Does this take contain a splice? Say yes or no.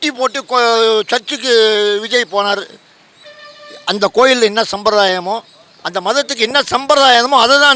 no